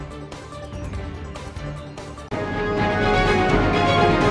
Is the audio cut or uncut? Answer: uncut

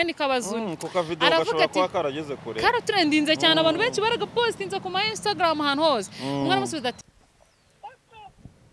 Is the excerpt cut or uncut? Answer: cut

